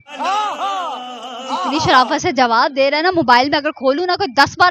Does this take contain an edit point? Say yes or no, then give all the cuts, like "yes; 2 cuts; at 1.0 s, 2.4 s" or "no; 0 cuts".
no; 0 cuts